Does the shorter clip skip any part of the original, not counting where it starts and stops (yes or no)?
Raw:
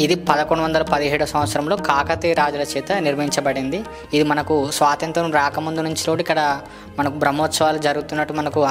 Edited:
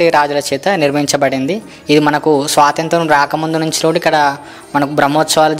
no